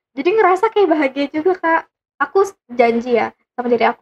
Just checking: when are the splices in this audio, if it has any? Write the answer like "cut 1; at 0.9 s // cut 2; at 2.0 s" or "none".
cut 1; at 2.0 s